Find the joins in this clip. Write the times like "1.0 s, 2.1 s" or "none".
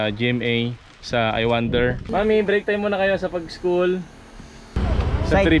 2.0 s, 4.7 s